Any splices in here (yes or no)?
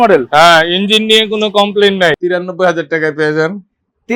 yes